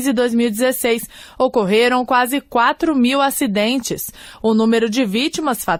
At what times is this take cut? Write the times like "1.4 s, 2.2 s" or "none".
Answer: none